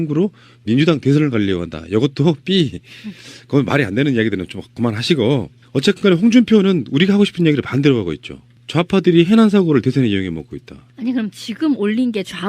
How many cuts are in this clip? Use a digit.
1